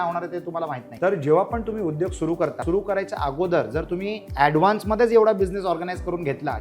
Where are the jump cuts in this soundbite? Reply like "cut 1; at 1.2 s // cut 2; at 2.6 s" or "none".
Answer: cut 1; at 0.8 s // cut 2; at 2.6 s // cut 3; at 4.2 s